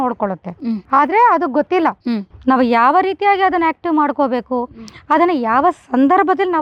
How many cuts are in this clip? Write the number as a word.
zero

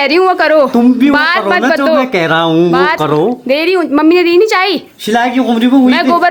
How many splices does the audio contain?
zero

